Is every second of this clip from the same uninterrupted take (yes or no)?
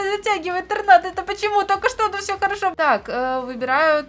no